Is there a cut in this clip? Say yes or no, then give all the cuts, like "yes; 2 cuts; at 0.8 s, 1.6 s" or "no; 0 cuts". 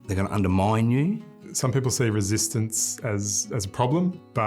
yes; 1 cut; at 1.4 s